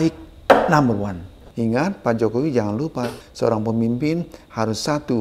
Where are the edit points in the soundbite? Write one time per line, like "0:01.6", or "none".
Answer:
0:01.4
0:03.2